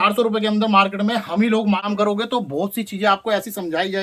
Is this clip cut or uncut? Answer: cut